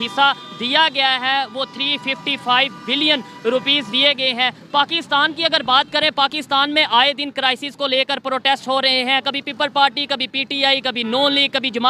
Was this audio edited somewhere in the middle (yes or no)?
no